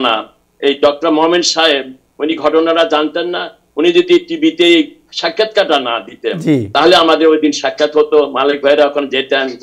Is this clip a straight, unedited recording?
yes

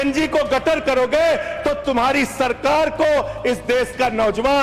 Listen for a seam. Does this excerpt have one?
no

